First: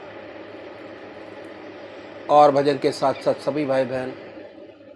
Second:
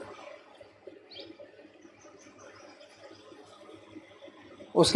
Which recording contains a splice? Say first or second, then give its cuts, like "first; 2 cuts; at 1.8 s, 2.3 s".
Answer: second; 1 cut; at 3.9 s